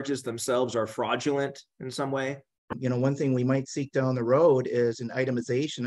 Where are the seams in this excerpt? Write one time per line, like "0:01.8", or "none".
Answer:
0:02.7